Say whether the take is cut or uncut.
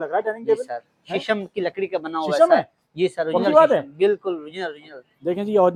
uncut